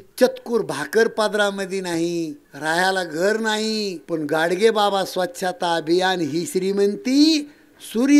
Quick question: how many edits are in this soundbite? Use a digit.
2